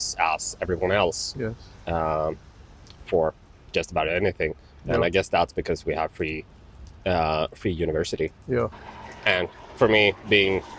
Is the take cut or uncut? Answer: cut